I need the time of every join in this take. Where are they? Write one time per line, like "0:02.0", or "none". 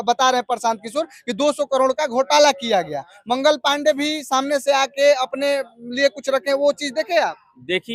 none